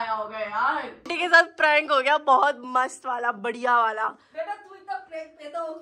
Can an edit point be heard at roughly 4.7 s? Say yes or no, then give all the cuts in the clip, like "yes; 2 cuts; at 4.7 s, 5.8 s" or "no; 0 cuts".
no; 1 cut; at 1.1 s